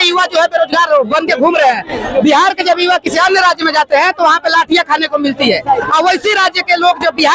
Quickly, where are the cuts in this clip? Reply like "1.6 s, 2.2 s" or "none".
none